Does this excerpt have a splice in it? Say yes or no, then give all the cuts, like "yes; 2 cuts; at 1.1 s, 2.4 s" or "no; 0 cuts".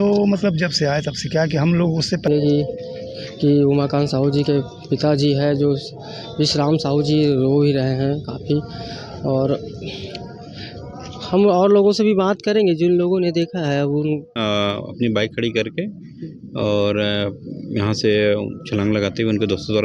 yes; 2 cuts; at 2.3 s, 14.3 s